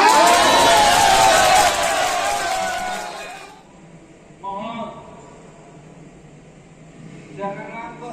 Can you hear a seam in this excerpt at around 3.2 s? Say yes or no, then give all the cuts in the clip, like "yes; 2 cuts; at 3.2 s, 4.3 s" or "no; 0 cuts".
yes; 1 cut; at 3.2 s